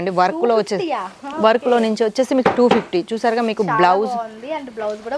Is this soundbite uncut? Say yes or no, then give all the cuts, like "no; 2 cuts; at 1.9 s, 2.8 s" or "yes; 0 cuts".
yes; 0 cuts